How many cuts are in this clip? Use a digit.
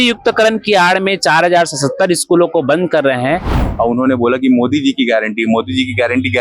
1